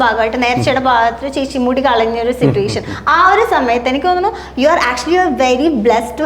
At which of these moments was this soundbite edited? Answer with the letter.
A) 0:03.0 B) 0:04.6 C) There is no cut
C